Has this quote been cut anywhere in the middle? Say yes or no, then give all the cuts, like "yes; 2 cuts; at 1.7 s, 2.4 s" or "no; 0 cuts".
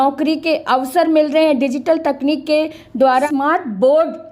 yes; 1 cut; at 3.3 s